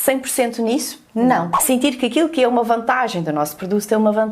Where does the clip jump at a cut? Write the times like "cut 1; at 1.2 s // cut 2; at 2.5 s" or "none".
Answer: cut 1; at 1.5 s